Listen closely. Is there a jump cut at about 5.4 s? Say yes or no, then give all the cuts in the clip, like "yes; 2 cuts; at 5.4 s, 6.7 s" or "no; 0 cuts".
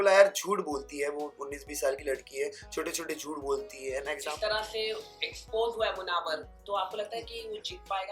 no; 1 cut; at 4.1 s